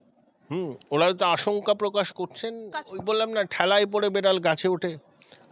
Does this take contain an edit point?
yes; 1 cut; at 2.7 s

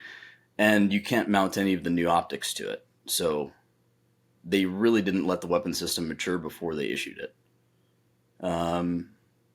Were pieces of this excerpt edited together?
no; 0 cuts

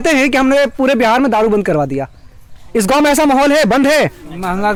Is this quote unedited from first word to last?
yes; 0 cuts

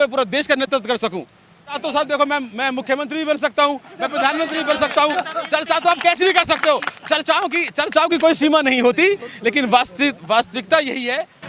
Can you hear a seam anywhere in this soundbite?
yes; 1 cut; at 1.8 s

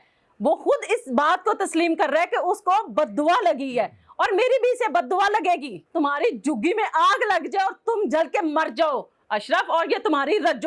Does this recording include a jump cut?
yes; 1 cut; at 5.8 s

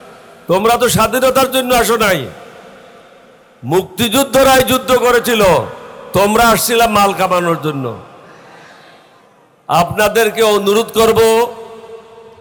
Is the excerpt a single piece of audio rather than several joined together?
yes; 0 cuts

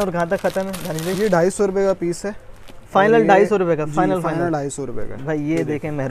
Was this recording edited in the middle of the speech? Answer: no; 0 cuts

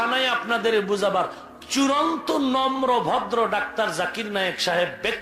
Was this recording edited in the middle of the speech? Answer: no; 0 cuts

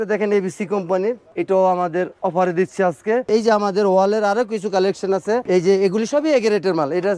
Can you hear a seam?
yes; 3 cuts; at 1.2 s, 3.3 s, 5.4 s

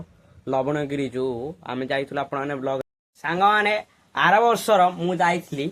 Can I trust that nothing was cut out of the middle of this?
no; 1 cut; at 2.8 s

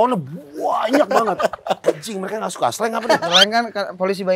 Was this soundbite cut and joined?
yes; 2 cuts; at 1.8 s, 3.2 s

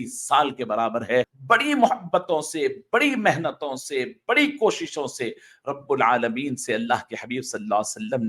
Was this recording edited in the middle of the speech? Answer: yes; 1 cut; at 1.4 s

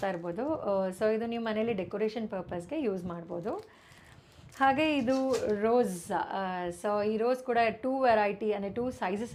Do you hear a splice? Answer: no; 0 cuts

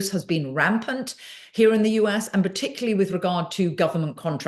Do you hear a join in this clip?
no; 0 cuts

